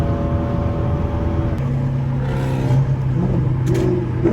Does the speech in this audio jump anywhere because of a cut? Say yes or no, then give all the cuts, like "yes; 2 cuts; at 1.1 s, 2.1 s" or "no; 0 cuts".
yes; 1 cut; at 1.6 s